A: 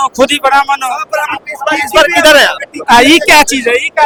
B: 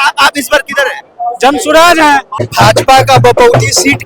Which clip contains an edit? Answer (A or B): B